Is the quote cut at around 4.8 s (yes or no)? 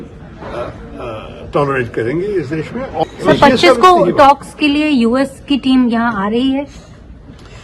no